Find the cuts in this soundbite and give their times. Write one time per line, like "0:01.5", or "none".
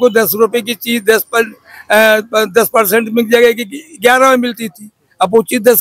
none

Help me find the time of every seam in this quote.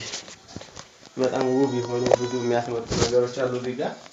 none

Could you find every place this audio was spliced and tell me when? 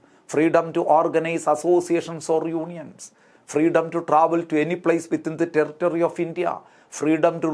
none

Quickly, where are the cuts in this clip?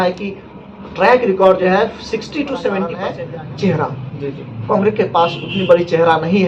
0:03.1

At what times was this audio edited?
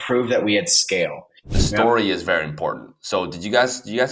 0:01.5

